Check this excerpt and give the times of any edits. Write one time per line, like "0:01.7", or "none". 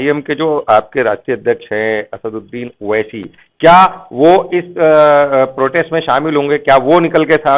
none